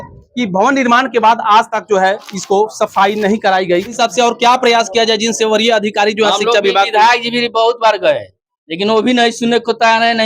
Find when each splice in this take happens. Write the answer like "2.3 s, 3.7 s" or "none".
3.9 s